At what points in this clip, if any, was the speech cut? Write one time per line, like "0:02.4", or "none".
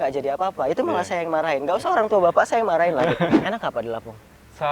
0:03.4